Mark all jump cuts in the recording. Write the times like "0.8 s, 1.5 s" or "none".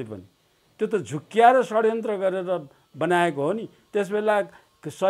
3.7 s